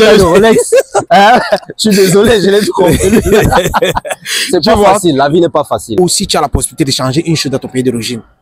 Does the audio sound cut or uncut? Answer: cut